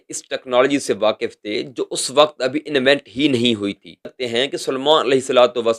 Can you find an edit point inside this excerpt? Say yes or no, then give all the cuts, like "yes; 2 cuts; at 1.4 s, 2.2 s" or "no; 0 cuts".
yes; 1 cut; at 4.2 s